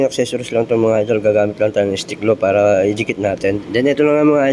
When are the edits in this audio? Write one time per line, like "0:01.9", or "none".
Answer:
0:03.6